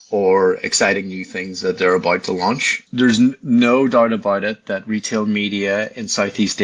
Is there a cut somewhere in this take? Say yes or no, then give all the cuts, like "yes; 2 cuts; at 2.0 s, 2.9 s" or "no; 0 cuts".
yes; 1 cut; at 2.8 s